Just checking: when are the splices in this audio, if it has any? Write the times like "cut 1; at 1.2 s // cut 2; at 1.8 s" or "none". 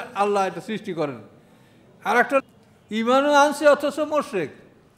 cut 1; at 2.4 s